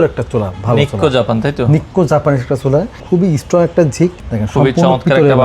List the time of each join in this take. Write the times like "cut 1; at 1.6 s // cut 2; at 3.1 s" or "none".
cut 1; at 3.0 s // cut 2; at 4.2 s

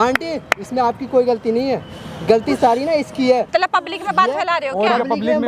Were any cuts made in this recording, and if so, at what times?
cut 1; at 3.5 s

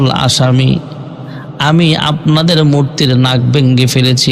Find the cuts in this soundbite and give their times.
none

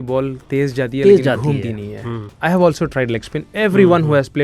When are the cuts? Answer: cut 1; at 2.3 s

